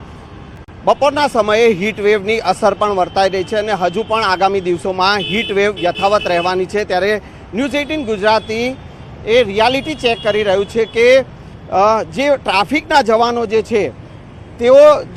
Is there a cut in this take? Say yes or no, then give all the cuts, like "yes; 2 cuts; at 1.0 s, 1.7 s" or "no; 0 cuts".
no; 0 cuts